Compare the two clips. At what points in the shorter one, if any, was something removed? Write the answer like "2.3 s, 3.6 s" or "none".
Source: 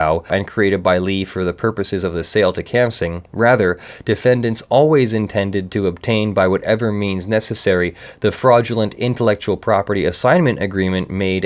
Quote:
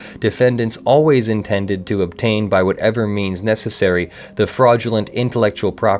none